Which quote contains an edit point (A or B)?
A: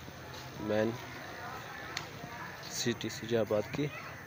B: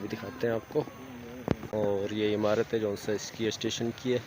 B